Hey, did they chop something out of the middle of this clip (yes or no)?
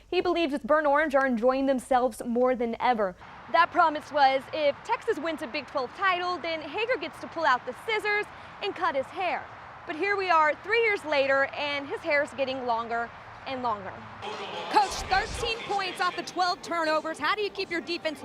yes